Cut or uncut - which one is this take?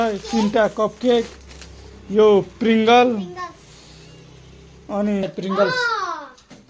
cut